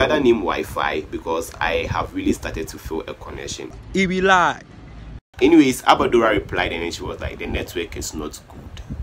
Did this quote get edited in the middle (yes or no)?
no